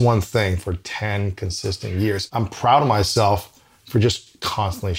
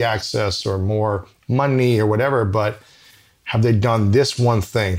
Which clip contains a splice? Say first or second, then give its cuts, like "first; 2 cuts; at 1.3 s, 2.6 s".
first; 1 cut; at 2.2 s